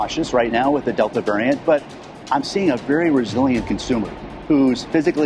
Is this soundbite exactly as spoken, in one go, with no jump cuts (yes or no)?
yes